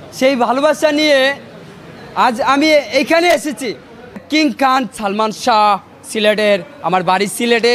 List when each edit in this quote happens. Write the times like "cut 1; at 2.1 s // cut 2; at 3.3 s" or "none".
cut 1; at 4.2 s